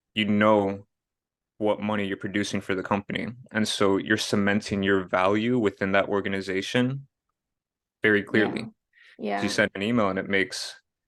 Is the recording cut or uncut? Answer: uncut